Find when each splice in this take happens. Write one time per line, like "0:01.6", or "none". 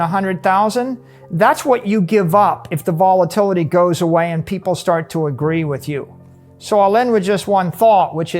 0:06.3